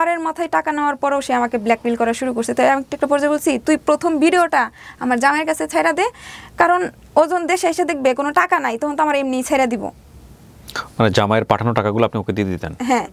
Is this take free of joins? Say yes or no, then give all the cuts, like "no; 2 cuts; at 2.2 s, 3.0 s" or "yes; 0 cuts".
yes; 0 cuts